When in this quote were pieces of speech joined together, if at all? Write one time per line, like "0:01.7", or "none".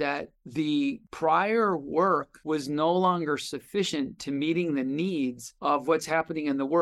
0:01.1
0:02.3